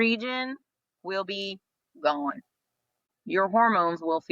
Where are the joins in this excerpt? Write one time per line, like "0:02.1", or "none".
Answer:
0:03.1